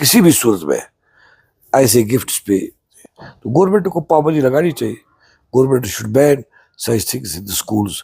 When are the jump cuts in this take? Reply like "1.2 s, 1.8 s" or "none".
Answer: 2.8 s